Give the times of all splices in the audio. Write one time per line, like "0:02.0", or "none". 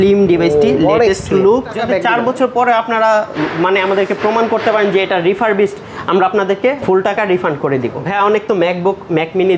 0:01.8
0:06.8
0:08.0